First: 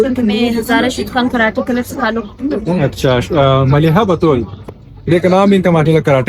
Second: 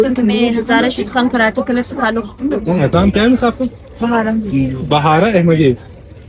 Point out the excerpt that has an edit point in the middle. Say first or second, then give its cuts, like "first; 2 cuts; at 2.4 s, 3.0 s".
second; 1 cut; at 2.9 s